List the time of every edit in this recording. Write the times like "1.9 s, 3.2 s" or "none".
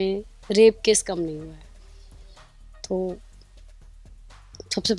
none